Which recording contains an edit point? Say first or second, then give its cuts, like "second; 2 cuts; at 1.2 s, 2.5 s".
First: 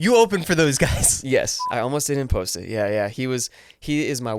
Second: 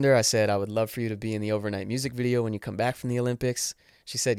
first; 1 cut; at 1.6 s